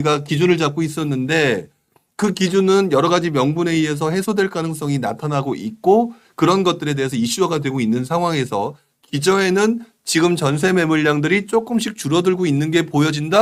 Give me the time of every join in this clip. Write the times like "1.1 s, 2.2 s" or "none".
none